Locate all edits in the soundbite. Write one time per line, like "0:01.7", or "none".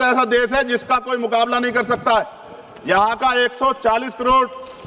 none